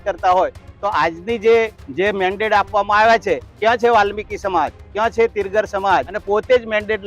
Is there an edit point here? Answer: yes; 3 cuts; at 1.8 s, 3.5 s, 6.2 s

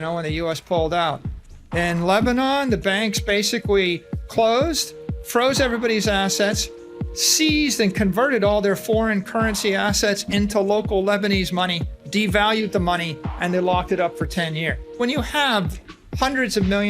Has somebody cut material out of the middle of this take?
yes; 1 cut; at 15.0 s

